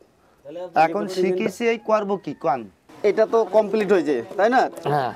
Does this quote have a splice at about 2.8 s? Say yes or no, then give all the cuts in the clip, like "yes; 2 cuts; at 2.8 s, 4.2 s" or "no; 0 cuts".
yes; 1 cut; at 2.8 s